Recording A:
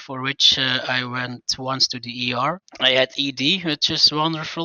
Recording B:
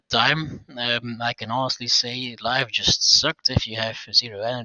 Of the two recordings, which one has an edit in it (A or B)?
A